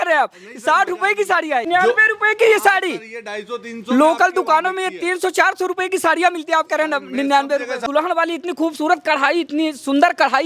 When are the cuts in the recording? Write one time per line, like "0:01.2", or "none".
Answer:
0:01.7
0:07.8